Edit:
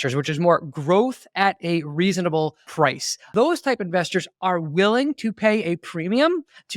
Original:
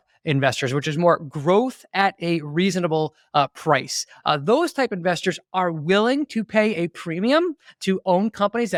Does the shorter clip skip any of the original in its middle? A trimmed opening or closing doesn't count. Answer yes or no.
yes